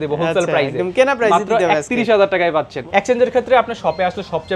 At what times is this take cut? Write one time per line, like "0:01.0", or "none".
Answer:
0:02.8